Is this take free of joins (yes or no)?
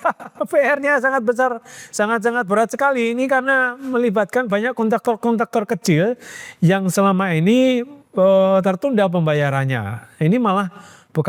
yes